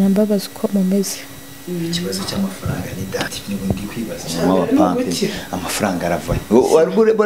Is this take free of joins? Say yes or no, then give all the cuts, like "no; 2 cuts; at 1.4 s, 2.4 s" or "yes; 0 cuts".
no; 1 cut; at 3.4 s